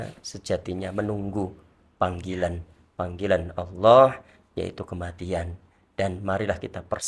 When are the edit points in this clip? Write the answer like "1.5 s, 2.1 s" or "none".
none